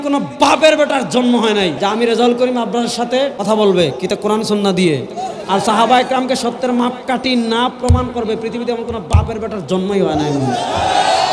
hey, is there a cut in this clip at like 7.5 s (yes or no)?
no